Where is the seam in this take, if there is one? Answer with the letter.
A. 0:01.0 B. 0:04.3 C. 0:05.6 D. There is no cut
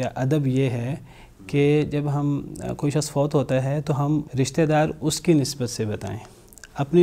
B